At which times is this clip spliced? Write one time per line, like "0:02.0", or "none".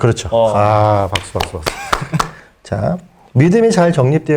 0:02.3